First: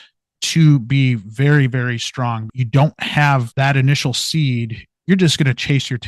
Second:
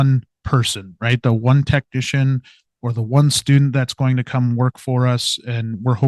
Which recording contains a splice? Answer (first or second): first